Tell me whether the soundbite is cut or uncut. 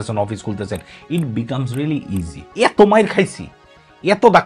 cut